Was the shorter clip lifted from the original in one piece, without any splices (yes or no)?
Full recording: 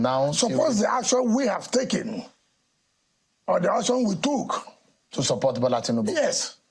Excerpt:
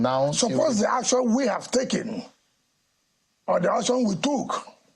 yes